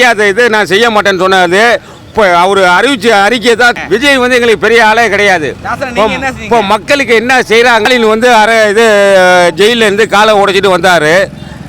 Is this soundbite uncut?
no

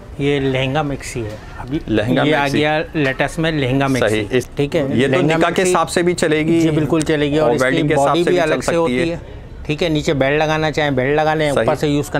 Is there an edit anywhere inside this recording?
no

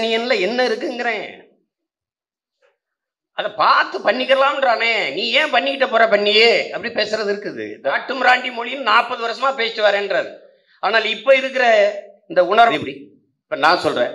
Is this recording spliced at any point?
yes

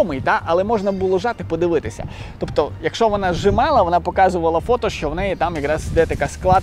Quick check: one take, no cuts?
yes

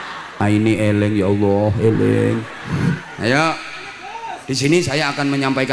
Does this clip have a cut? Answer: no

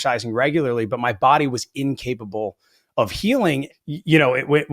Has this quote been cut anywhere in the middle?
yes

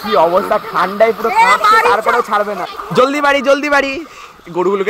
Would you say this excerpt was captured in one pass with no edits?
no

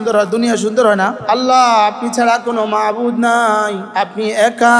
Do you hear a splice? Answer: yes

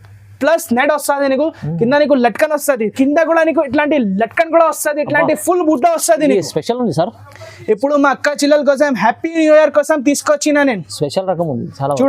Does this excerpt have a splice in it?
yes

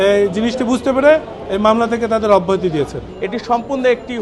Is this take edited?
yes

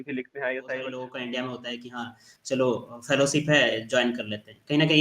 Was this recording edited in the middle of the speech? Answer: yes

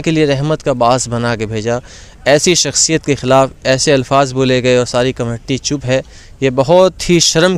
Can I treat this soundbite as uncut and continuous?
yes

